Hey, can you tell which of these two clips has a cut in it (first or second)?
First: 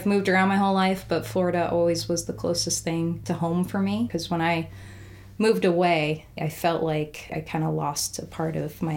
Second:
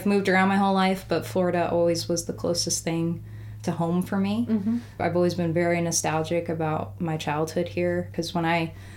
first